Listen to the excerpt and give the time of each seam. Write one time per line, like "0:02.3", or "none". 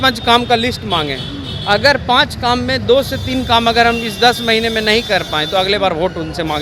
none